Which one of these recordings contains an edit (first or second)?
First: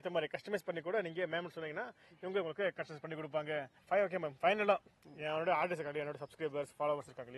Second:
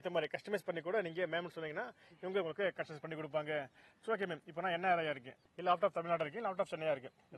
first